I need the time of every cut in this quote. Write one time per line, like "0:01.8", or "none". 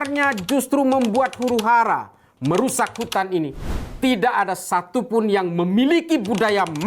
none